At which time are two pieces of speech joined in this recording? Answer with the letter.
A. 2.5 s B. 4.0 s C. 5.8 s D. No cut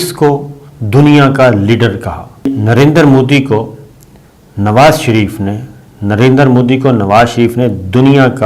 A